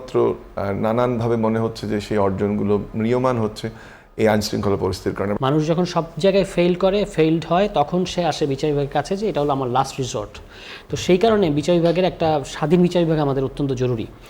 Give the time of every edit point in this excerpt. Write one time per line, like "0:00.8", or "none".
0:05.4